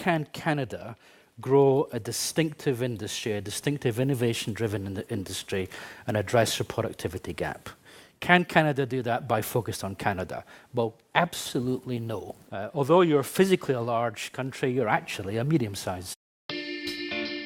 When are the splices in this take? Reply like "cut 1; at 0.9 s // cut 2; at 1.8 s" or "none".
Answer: none